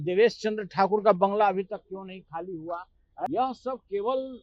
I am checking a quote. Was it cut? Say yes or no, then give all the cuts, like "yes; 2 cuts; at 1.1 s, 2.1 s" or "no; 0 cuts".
yes; 1 cut; at 3.3 s